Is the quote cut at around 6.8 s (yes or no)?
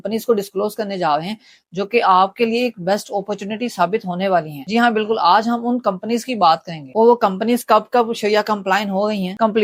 no